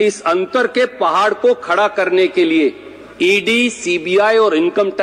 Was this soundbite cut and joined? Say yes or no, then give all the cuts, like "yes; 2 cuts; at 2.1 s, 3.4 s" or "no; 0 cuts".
no; 0 cuts